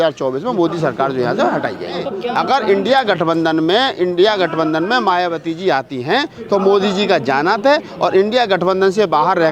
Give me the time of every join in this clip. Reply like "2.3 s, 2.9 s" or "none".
2.1 s